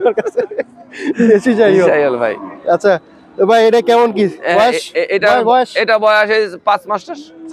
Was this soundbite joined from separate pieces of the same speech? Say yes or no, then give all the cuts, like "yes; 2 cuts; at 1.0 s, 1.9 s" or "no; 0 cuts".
no; 0 cuts